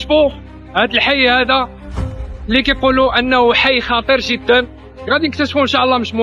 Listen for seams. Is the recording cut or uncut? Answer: uncut